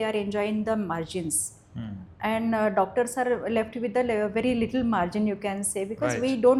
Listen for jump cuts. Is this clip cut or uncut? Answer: uncut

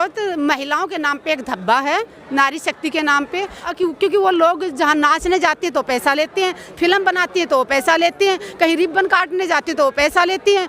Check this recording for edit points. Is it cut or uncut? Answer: cut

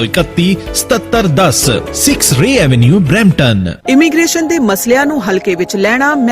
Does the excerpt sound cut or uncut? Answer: cut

